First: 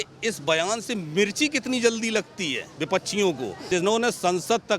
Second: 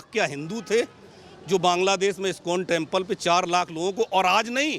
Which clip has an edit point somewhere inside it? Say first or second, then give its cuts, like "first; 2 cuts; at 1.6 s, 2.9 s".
first; 1 cut; at 3.6 s